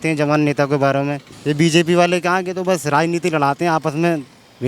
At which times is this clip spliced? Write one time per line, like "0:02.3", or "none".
0:01.3